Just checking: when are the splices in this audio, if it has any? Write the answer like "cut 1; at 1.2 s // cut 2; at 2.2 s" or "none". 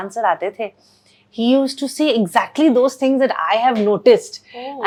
none